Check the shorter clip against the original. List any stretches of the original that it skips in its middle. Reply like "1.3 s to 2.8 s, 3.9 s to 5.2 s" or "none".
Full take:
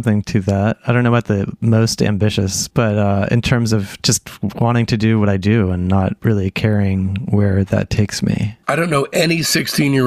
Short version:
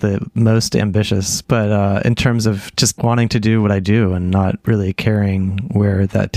4.2 s to 4.5 s